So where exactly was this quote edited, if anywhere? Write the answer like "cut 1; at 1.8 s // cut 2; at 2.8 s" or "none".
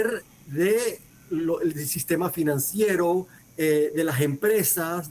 cut 1; at 1.1 s // cut 2; at 3.4 s